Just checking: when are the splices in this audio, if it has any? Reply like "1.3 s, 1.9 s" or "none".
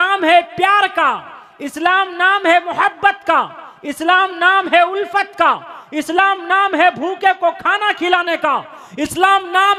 none

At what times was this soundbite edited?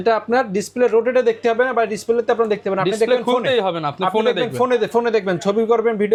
none

